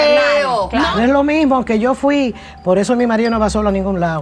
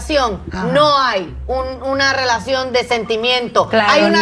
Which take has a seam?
first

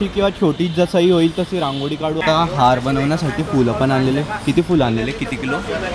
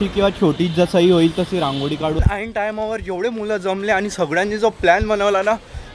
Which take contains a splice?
second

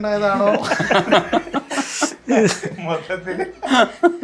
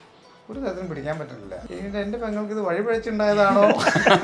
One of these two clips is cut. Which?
second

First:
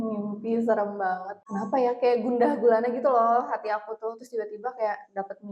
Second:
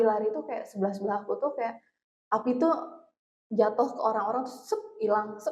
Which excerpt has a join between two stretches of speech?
first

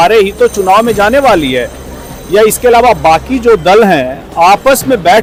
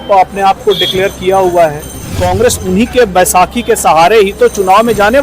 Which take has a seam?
second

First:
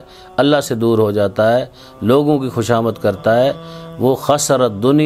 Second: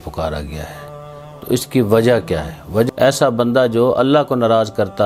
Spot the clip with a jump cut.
second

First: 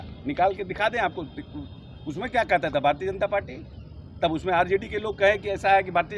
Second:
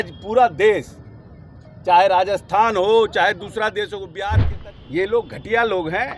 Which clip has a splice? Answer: second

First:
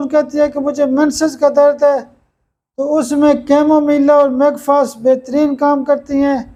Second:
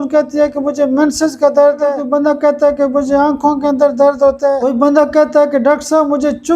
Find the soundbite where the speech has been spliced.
second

